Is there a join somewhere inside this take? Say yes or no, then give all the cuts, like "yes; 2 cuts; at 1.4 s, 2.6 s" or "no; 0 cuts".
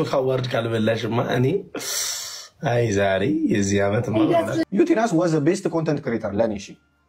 yes; 1 cut; at 4.6 s